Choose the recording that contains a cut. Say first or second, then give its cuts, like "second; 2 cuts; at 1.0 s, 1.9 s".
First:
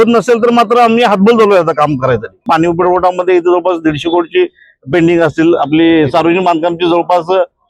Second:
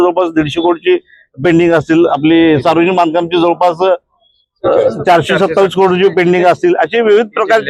first; 1 cut; at 2.4 s